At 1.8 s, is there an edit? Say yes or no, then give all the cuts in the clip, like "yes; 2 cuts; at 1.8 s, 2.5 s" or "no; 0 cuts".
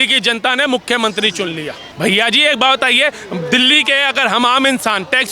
yes; 1 cut; at 1.8 s